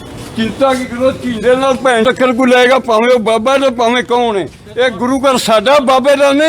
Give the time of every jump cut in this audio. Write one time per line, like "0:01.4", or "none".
0:02.0